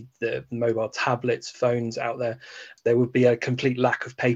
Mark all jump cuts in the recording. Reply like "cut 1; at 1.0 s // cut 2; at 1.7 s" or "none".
cut 1; at 2.6 s